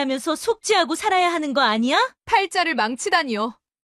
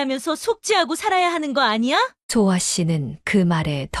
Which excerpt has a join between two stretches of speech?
first; 1 cut; at 2.2 s

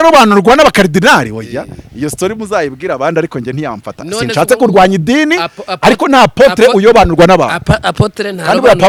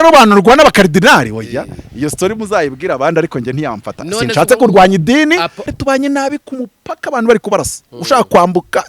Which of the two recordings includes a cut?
second; 1 cut; at 5.6 s

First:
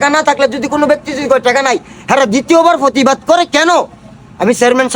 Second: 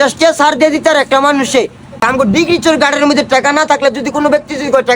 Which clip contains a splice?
second; 1 cut; at 2.1 s

